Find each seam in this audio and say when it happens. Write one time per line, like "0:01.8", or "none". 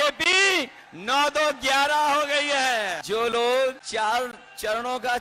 0:03.0
0:03.8